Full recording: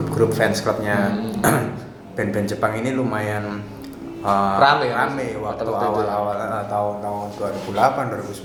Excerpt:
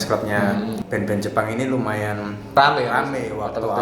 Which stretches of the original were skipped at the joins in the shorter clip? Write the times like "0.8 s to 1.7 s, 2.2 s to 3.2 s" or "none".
1.3 s to 2.0 s, 3.8 s to 4.6 s